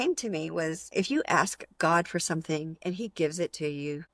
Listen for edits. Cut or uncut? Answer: cut